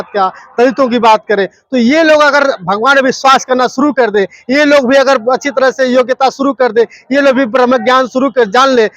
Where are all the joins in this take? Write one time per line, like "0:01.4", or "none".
none